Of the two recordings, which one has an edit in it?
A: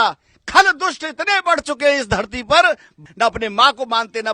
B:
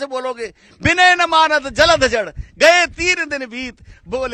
A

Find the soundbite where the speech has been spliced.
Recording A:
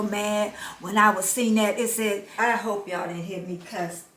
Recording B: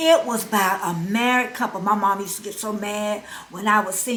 A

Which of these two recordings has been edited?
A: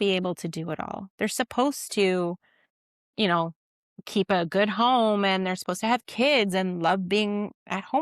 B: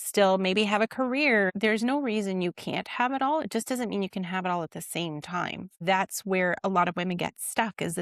B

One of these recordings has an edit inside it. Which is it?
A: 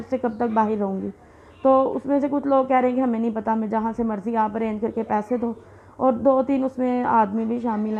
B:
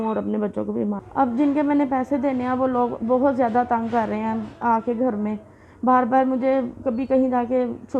B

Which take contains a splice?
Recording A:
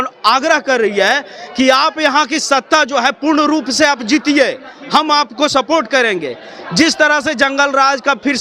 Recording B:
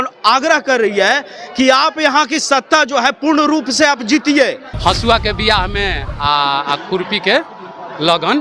B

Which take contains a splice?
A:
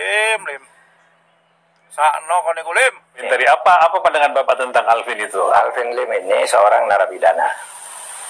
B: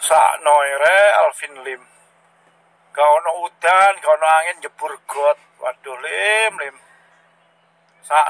A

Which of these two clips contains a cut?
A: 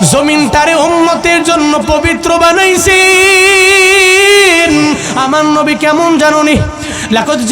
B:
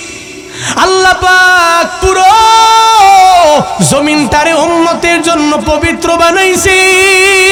A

